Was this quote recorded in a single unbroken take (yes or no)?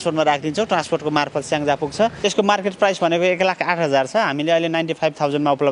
no